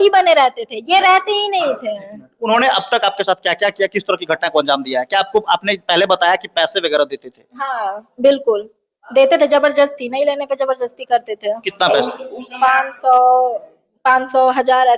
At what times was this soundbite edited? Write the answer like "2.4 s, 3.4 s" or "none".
none

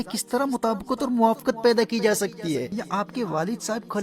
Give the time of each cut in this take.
2.7 s

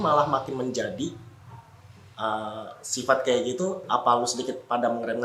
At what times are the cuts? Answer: none

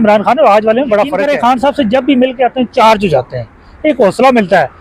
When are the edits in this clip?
1.2 s

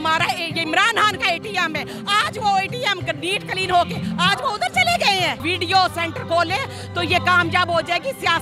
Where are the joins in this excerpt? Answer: 5.4 s

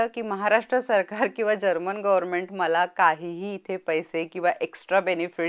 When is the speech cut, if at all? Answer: none

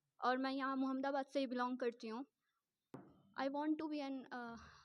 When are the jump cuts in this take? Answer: 3.2 s

